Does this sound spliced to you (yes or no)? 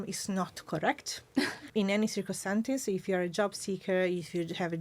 yes